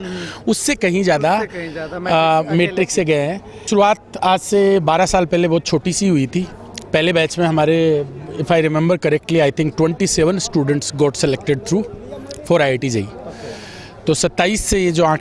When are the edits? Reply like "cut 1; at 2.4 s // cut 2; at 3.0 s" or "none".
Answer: cut 1; at 3.7 s